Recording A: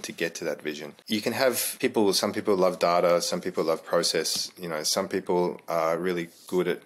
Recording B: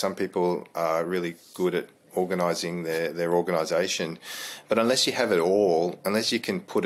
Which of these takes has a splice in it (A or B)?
A